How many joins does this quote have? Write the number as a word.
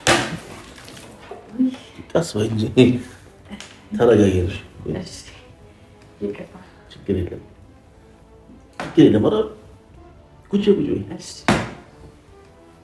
zero